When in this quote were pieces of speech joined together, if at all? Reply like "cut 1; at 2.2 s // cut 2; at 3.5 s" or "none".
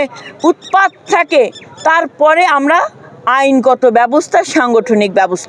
none